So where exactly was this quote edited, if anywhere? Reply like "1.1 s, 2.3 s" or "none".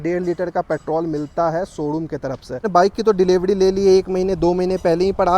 2.6 s

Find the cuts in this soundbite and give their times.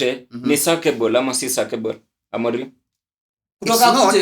none

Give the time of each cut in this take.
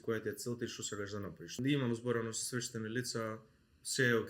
1.6 s

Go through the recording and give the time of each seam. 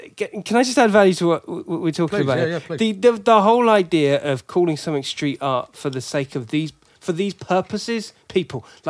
none

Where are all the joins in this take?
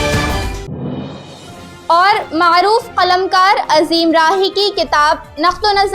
1.3 s

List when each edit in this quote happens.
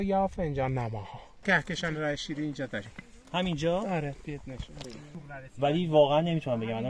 1.4 s

